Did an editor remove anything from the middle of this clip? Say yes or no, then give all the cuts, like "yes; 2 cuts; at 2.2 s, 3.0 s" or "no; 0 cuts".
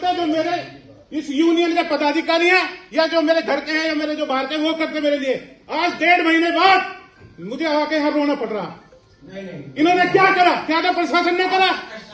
no; 0 cuts